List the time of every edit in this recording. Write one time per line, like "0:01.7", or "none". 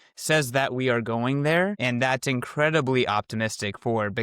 0:01.8